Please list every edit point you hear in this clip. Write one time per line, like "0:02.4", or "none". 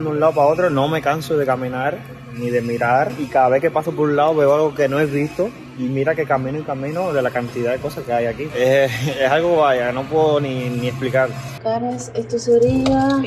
none